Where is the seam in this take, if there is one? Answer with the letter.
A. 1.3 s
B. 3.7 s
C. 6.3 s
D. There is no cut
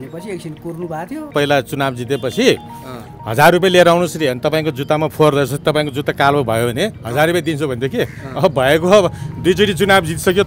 A